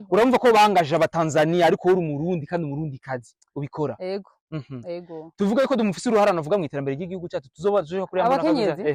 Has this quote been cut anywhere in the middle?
no; 0 cuts

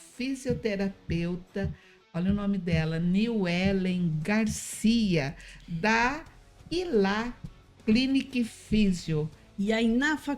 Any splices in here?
yes; 1 cut; at 9.4 s

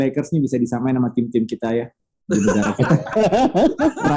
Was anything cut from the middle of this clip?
no; 0 cuts

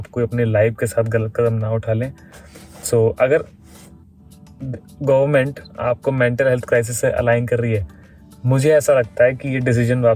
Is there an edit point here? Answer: no; 0 cuts

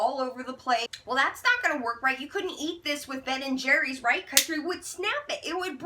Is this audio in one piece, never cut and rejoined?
no; 1 cut; at 0.9 s

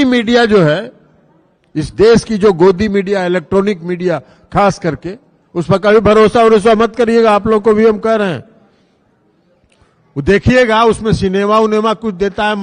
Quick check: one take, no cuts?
yes; 0 cuts

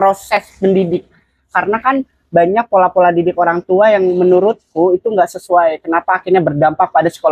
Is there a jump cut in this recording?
no; 0 cuts

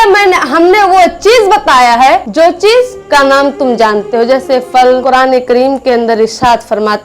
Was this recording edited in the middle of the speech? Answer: yes; 2 cuts; at 2.3 s, 5.0 s

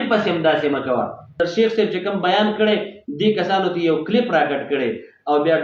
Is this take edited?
yes; 1 cut; at 1.4 s

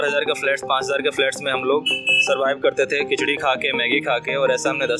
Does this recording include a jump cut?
no; 0 cuts

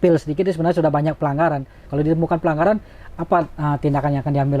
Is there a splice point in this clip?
yes; 1 cut; at 1.8 s

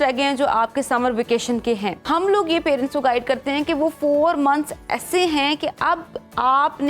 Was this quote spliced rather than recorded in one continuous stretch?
yes; 1 cut; at 2.0 s

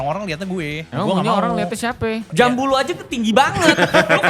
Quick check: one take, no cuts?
no; 2 cuts; at 0.8 s, 2.2 s

